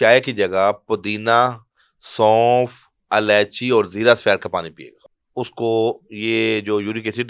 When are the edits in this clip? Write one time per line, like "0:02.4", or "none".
0:05.0